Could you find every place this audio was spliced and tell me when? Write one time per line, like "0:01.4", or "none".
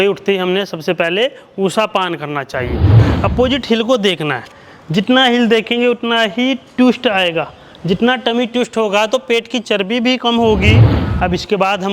0:02.9
0:11.0